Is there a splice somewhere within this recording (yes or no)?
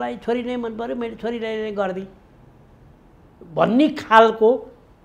no